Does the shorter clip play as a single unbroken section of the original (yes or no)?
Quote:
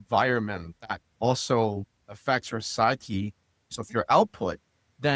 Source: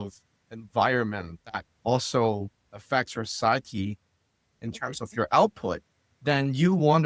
no